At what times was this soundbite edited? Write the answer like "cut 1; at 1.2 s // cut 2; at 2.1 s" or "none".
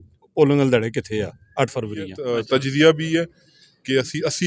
cut 1; at 2.2 s

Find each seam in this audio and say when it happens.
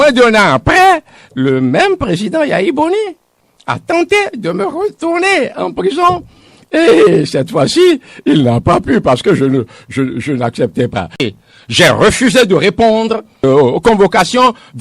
cut 1; at 11.1 s

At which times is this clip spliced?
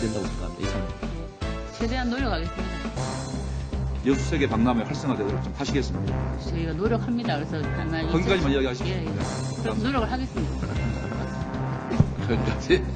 cut 1; at 9.4 s

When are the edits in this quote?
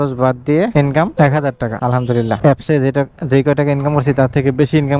cut 1; at 2.4 s

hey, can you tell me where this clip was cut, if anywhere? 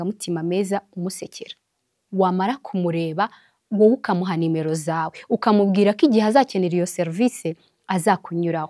cut 1; at 2.0 s

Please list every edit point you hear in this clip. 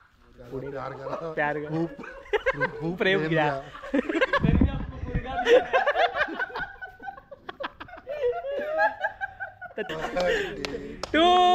cut 1; at 9.7 s

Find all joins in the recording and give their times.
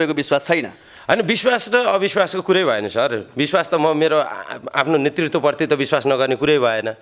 none

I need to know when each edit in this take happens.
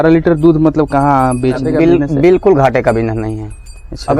cut 1; at 1.6 s

